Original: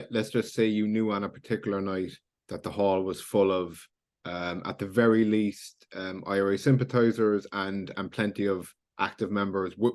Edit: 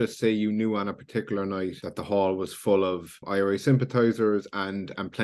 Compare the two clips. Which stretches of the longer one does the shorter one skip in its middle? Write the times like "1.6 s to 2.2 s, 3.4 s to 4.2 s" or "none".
2.2 s to 2.5 s, 3.8 s to 6.1 s